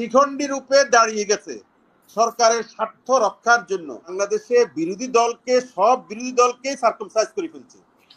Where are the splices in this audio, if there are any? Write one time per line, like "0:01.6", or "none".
0:04.1